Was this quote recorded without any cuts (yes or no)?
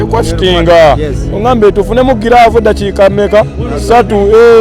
yes